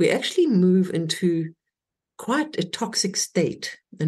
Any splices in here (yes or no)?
no